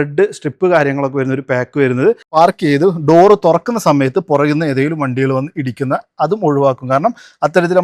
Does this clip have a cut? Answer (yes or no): yes